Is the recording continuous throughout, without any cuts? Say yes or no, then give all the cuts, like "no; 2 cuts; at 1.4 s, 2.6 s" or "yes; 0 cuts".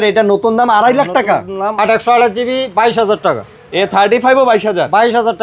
no; 1 cut; at 1.7 s